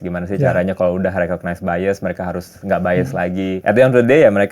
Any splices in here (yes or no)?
yes